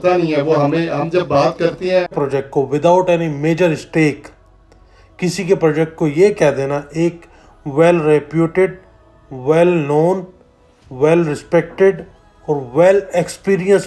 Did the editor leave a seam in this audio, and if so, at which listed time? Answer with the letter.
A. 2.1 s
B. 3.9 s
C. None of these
A